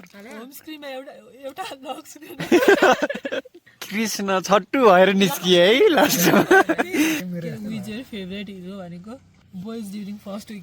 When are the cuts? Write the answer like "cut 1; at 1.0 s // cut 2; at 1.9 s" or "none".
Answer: cut 1; at 7.2 s // cut 2; at 9.4 s

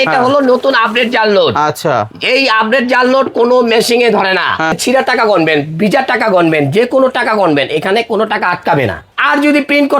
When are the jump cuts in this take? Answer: cut 1; at 4.8 s // cut 2; at 9.0 s

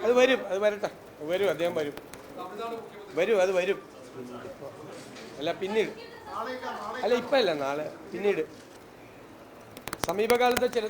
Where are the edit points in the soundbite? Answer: cut 1; at 8.8 s

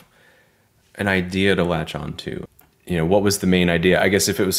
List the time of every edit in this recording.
cut 1; at 2.4 s

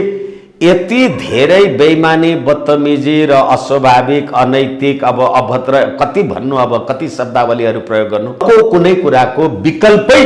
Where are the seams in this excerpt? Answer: cut 1; at 8.4 s

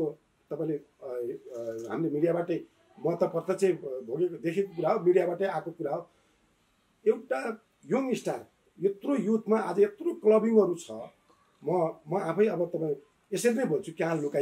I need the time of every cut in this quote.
none

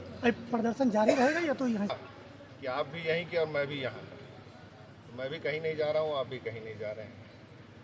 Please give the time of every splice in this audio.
cut 1; at 1.9 s

